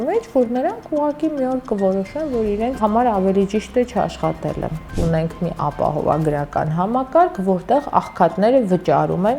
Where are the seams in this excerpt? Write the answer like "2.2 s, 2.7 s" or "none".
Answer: 2.8 s, 4.9 s